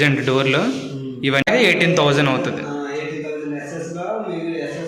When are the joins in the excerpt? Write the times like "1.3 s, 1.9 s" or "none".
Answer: 1.5 s